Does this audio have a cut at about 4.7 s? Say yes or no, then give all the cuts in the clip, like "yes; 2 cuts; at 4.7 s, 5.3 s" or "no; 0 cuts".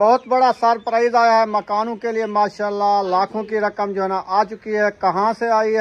no; 0 cuts